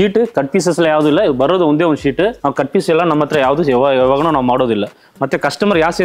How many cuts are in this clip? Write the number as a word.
zero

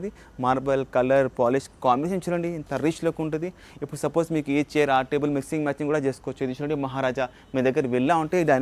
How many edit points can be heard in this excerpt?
zero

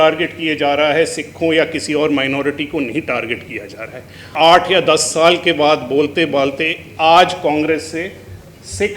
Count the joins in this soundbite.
one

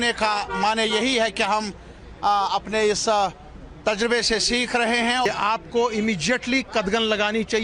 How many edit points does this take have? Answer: one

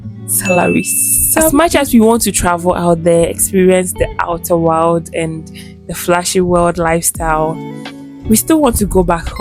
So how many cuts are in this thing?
one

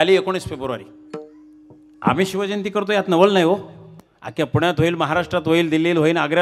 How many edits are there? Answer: one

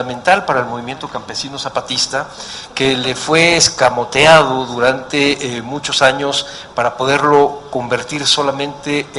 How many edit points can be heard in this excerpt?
one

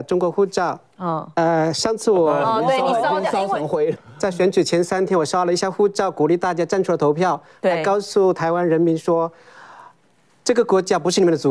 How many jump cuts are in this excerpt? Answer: one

